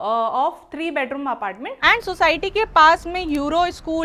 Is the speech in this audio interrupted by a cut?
yes; 1 cut; at 1.7 s

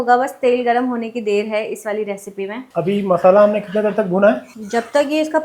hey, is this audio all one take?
yes; 0 cuts

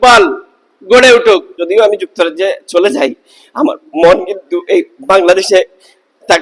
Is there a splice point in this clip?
yes; 1 cut; at 1.6 s

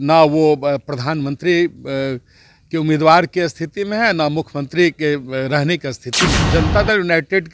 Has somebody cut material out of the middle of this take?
yes; 1 cut; at 6.4 s

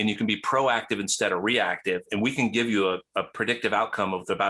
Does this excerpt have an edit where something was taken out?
no; 0 cuts

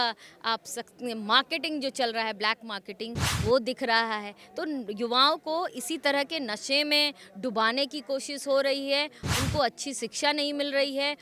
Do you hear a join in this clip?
no; 0 cuts

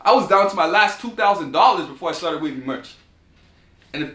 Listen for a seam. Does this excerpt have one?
no; 0 cuts

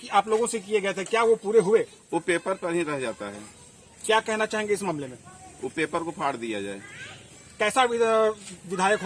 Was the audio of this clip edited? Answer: no; 0 cuts

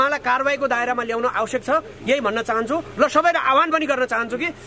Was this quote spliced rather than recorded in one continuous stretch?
no; 0 cuts

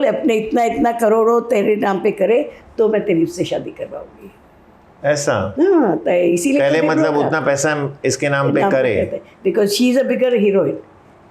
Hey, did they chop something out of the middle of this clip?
no; 0 cuts

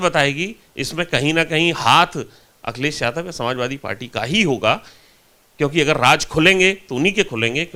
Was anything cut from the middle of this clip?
no; 0 cuts

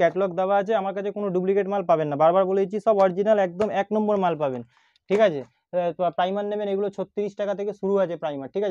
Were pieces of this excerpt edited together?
no; 0 cuts

